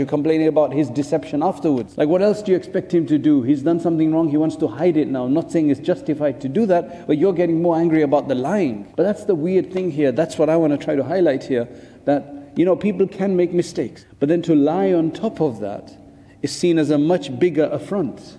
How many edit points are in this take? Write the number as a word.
three